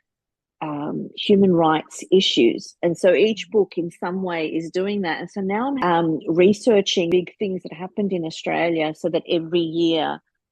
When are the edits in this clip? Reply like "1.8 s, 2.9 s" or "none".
5.8 s, 7.1 s